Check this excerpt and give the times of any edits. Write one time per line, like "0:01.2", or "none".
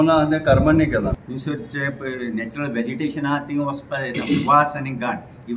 0:01.2